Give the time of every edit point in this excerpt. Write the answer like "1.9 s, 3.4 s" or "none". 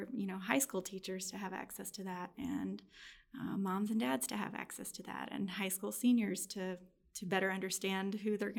none